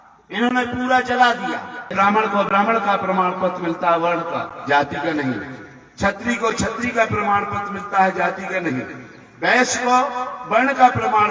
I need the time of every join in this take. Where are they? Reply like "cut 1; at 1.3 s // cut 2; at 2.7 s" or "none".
cut 1; at 1.9 s